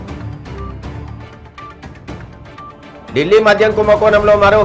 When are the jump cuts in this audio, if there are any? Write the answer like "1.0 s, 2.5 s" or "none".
0.9 s